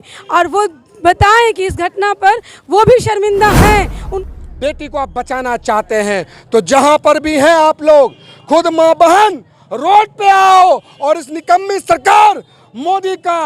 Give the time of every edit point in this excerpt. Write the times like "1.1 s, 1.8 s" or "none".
4.1 s